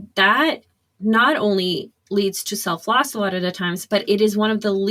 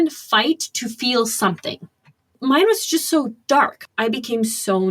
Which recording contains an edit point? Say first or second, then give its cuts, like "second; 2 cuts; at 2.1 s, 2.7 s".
second; 2 cuts; at 2.6 s, 3.8 s